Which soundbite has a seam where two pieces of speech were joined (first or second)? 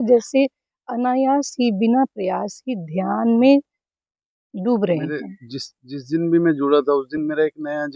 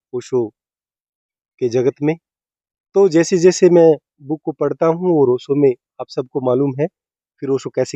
first